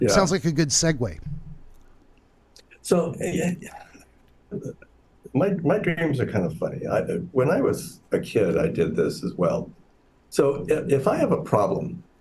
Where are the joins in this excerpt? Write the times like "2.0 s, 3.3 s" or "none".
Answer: 1.7 s